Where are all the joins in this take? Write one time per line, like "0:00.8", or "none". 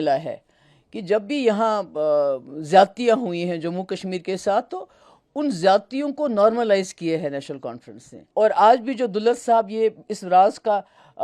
0:08.2